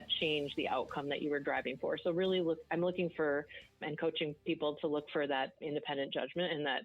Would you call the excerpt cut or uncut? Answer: cut